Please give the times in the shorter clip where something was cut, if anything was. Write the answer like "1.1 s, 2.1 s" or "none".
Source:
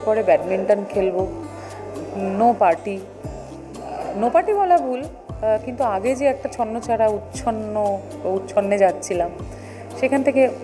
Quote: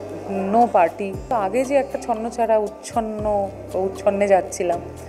1.3 s